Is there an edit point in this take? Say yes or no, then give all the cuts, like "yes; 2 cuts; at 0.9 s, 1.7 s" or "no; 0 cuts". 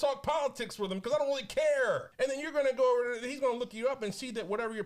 no; 0 cuts